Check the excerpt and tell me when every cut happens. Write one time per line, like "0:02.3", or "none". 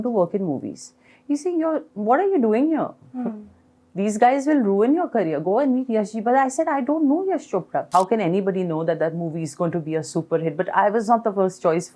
0:07.9